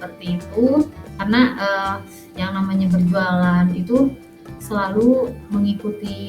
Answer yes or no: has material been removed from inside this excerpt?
yes